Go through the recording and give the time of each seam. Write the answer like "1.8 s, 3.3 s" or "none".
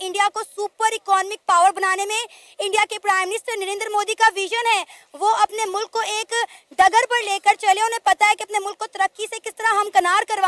none